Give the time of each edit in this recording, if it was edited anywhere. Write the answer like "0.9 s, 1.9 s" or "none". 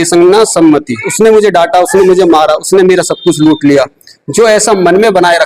1.1 s